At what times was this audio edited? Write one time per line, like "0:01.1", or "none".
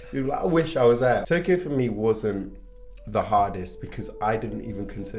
0:01.2